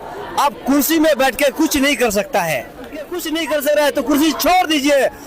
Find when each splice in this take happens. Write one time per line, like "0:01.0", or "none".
0:03.3